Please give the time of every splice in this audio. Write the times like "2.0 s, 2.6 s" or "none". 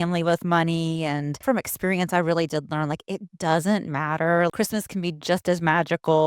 1.3 s, 4.5 s

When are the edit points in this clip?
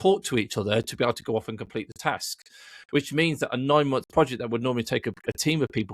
none

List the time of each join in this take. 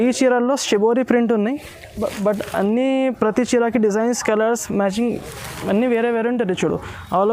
none

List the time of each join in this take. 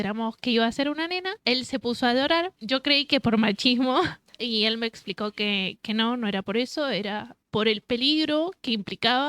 1.3 s, 2.6 s, 4.3 s, 7.3 s

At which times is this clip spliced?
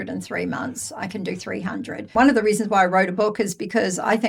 2.1 s

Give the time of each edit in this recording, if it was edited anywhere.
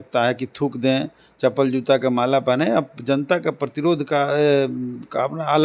none

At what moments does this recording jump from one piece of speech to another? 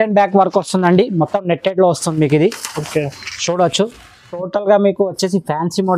4.3 s

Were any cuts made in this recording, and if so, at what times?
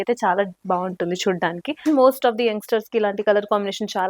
1.7 s

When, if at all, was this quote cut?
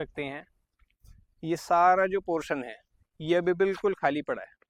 none

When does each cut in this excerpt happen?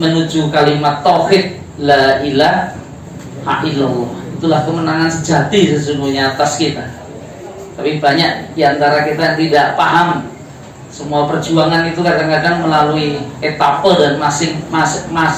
none

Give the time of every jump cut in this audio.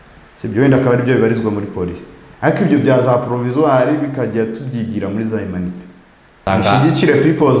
6.4 s

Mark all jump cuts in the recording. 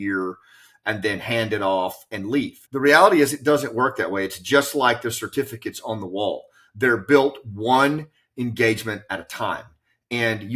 2.6 s

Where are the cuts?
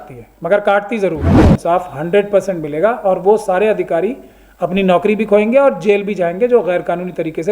1.3 s

